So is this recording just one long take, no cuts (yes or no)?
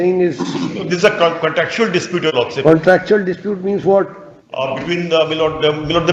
yes